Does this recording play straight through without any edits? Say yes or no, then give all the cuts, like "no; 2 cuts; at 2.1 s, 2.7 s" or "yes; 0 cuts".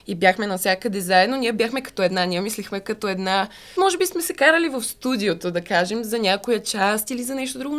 no; 1 cut; at 3.7 s